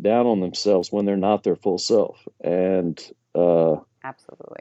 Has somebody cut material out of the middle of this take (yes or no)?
no